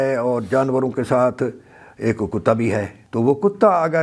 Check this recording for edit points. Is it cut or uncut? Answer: cut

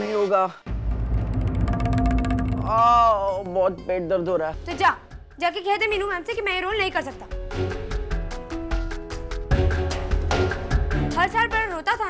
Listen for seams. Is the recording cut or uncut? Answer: cut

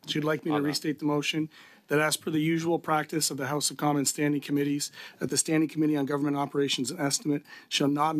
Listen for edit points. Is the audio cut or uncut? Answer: uncut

